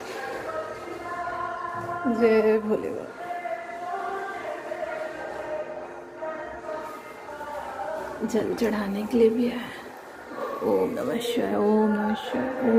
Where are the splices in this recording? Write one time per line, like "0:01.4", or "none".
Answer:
none